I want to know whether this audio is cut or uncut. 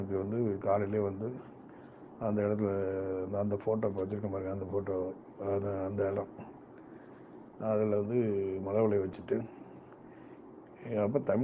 uncut